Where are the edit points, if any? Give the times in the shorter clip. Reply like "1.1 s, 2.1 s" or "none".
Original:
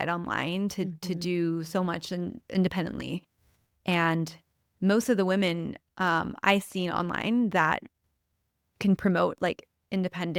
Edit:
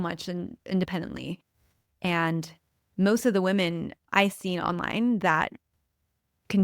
4.0 s